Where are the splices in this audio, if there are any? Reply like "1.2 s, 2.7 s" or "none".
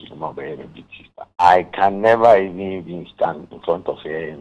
1.1 s